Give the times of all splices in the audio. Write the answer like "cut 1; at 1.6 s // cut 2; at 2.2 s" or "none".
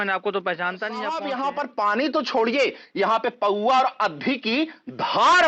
cut 1; at 1.1 s